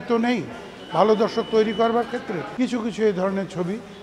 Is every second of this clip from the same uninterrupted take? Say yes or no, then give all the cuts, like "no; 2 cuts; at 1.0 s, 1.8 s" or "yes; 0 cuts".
no; 1 cut; at 2.4 s